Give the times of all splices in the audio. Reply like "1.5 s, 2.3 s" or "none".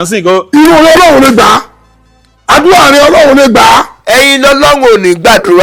4.0 s